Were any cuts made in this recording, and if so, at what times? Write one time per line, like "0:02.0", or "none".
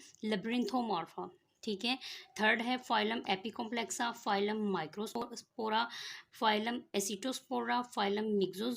0:05.2